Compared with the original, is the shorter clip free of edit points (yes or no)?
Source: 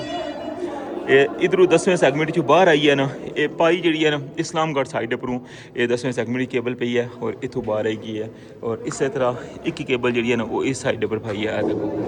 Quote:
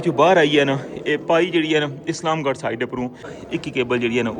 no